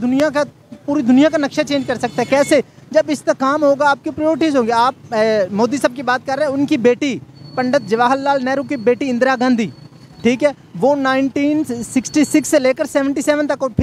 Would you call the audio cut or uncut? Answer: uncut